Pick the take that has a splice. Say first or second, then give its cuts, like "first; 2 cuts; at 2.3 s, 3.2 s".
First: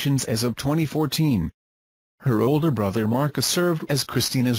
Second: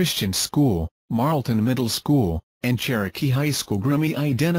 first; 1 cut; at 2.0 s